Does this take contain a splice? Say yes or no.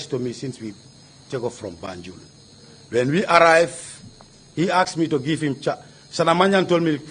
yes